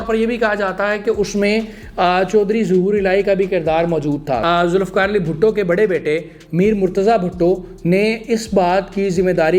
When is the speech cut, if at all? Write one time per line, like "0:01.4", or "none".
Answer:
0:04.4